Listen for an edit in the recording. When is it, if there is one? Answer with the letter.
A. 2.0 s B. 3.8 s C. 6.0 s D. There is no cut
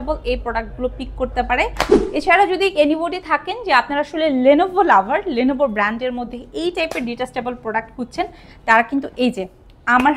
A